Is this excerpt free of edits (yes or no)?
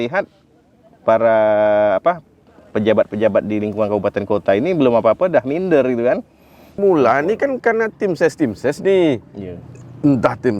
no